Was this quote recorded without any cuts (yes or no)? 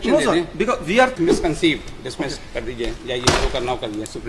no